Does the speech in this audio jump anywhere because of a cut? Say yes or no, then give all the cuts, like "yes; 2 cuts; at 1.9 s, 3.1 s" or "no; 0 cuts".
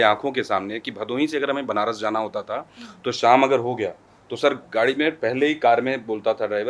no; 0 cuts